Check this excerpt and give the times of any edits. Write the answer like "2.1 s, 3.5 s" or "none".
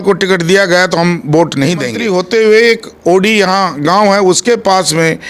2.0 s